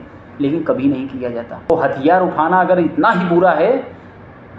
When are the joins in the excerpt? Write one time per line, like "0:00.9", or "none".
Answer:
0:01.7